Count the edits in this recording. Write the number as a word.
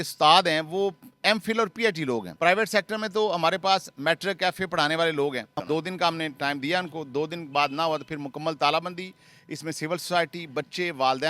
one